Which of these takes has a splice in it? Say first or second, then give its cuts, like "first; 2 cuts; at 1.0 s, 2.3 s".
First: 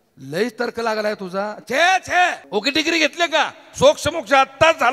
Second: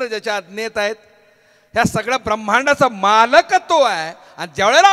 first; 1 cut; at 2.4 s